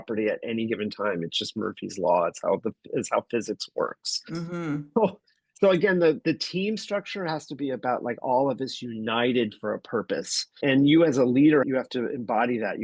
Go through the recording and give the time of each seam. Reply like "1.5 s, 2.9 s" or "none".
10.6 s, 11.7 s

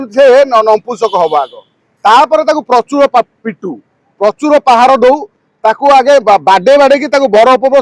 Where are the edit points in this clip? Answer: none

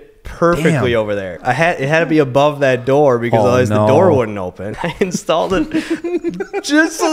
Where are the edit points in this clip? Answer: 1.4 s, 4.6 s

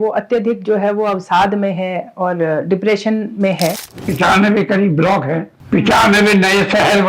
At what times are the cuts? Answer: 4.1 s, 5.5 s

